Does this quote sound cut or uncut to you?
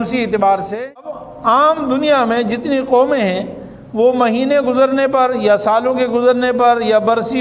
cut